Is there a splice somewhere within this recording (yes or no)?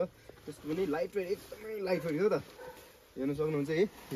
no